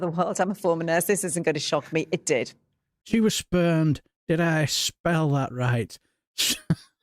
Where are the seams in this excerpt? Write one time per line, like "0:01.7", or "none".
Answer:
0:02.9